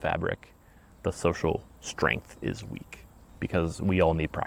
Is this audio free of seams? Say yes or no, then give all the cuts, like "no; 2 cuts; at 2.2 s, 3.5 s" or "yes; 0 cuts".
yes; 0 cuts